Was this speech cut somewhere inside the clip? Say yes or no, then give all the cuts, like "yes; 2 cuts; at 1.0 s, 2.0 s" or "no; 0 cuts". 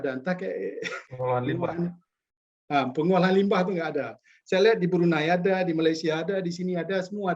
yes; 1 cut; at 1.0 s